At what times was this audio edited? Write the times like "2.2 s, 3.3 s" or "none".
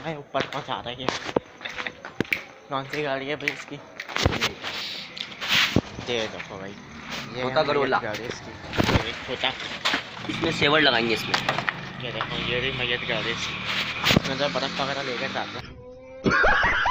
15.6 s